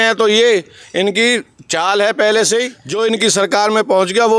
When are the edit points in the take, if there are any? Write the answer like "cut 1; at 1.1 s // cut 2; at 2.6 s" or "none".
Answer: cut 1; at 2.8 s

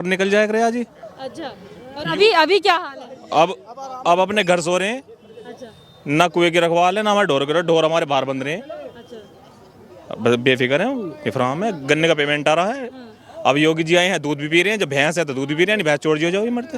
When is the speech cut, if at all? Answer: none

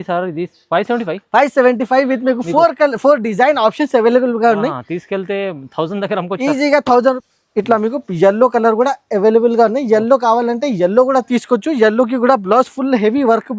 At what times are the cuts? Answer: cut 1; at 7.2 s

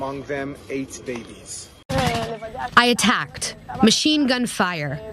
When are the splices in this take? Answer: cut 1; at 1.9 s

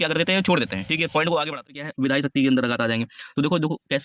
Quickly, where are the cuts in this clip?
cut 1; at 1.8 s

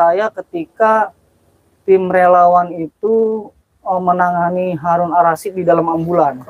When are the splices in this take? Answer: none

